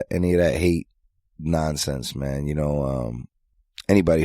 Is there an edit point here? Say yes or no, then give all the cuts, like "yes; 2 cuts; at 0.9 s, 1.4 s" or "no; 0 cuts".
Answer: yes; 1 cut; at 3.3 s